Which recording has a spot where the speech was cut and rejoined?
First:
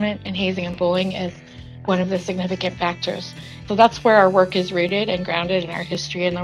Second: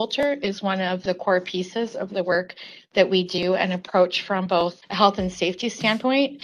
first; 2 cuts; at 1.6 s, 3.6 s

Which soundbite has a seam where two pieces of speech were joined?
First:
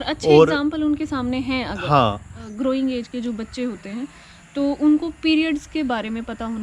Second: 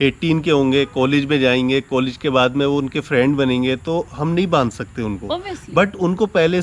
first; 1 cut; at 2.4 s

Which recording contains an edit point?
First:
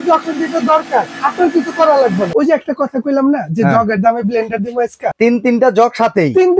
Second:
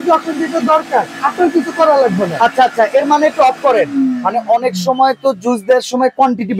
first; 2 cuts; at 2.3 s, 5.0 s

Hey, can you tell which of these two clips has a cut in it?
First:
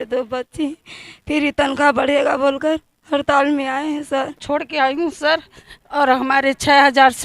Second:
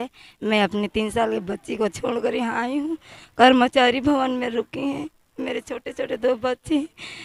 first; 1 cut; at 4.4 s

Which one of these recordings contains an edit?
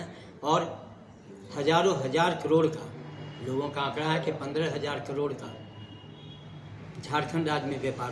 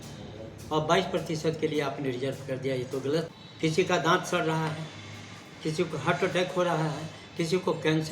second; 1 cut; at 3.4 s

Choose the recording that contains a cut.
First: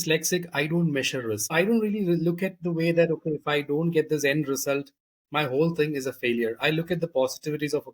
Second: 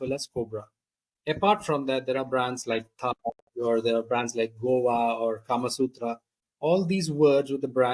first; 1 cut; at 1.5 s

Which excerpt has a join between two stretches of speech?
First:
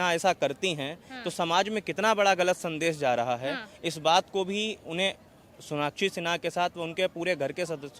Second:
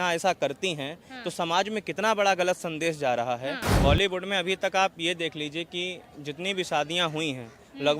second; 1 cut; at 3.7 s

